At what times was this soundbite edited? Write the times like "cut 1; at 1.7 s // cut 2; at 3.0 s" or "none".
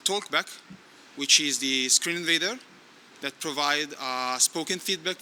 none